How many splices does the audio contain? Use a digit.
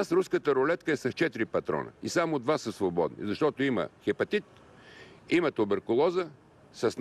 0